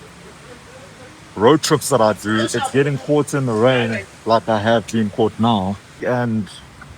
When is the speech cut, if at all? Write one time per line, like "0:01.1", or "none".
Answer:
0:05.9